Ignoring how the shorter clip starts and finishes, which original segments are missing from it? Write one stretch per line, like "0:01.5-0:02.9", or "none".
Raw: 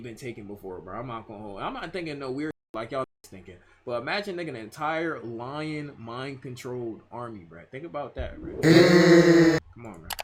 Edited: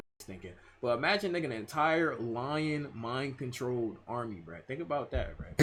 none

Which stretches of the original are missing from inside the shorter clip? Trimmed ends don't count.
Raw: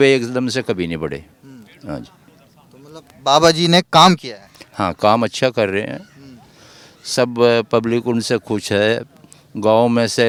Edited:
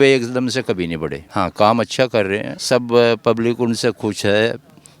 0:01.2-0:04.6
0:06.0-0:07.0

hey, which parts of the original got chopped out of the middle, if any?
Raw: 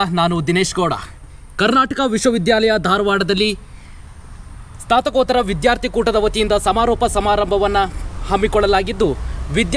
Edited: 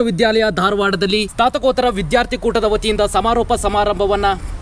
0:03.6-0:04.8

